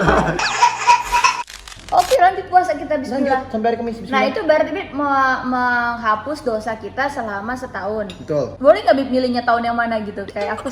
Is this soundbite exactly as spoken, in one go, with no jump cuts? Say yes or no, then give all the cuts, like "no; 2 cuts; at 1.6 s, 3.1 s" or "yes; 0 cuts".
no; 2 cuts; at 1.5 s, 8.5 s